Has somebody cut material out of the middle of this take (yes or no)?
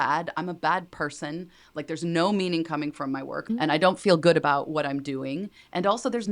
yes